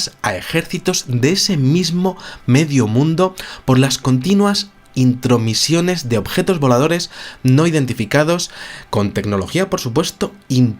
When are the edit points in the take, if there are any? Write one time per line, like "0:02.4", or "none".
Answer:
0:02.3